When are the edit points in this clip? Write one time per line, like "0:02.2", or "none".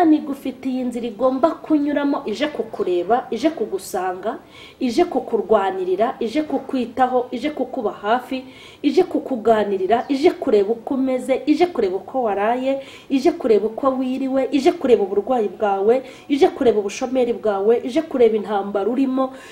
none